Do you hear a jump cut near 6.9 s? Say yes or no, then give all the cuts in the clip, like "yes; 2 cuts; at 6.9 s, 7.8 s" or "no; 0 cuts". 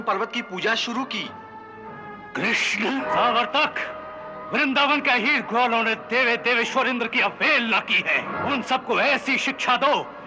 no; 2 cuts; at 3.1 s, 8.3 s